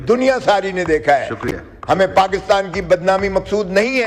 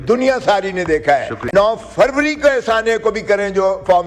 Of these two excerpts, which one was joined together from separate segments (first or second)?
second